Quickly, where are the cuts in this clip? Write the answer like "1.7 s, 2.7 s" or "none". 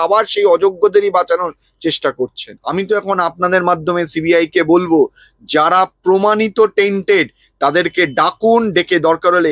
2.5 s